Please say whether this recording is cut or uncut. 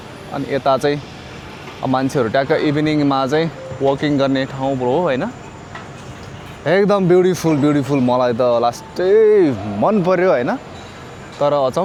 uncut